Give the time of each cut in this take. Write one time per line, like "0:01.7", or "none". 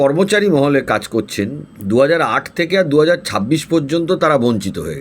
0:01.7